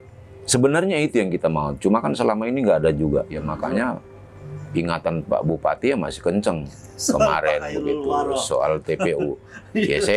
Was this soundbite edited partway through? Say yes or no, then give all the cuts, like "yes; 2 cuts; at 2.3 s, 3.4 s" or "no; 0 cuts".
yes; 1 cut; at 3.4 s